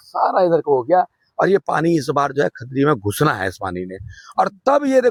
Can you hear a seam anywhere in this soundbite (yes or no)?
no